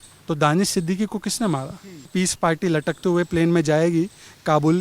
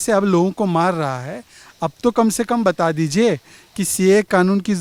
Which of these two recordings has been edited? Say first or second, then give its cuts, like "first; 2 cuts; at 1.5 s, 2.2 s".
first; 1 cut; at 2.1 s